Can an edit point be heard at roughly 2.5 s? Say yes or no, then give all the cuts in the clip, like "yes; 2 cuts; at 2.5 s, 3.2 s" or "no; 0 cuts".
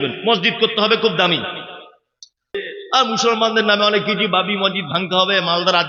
yes; 1 cut; at 2.5 s